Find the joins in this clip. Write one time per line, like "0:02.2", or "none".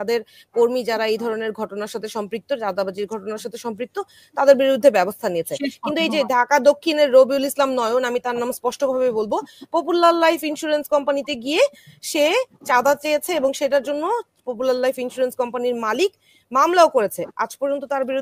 none